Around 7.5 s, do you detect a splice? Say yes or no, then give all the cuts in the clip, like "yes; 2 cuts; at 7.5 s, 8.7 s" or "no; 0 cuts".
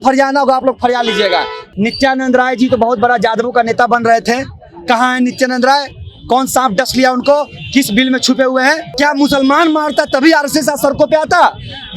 no; 2 cuts; at 1.6 s, 8.9 s